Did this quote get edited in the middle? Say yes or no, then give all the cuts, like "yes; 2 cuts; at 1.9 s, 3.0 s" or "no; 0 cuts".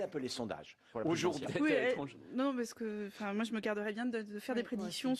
no; 0 cuts